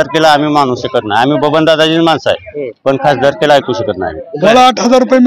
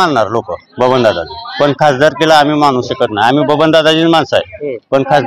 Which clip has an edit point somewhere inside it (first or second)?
first